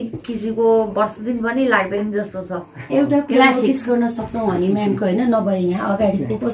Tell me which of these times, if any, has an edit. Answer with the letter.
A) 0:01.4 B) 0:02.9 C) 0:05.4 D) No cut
B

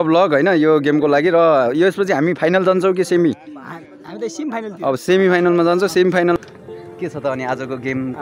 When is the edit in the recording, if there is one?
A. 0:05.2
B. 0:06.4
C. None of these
B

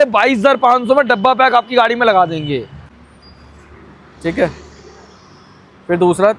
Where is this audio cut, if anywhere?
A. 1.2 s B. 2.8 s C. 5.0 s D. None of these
B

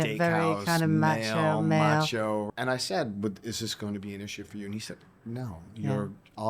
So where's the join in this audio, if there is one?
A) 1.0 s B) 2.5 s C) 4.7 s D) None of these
B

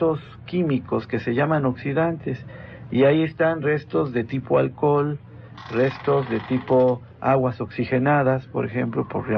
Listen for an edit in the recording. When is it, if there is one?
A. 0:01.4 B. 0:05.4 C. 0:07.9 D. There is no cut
A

